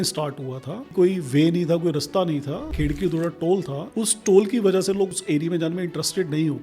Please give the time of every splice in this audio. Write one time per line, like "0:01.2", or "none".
0:00.9
0:02.7
0:03.8
0:05.1